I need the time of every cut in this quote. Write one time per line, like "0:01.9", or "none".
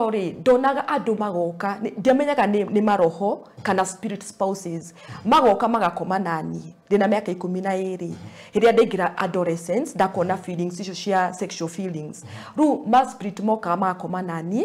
none